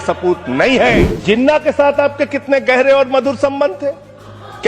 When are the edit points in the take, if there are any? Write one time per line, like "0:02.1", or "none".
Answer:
0:01.1